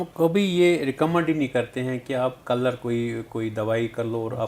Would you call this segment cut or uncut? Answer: uncut